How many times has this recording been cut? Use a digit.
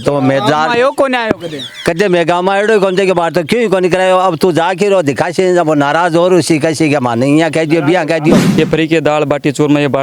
1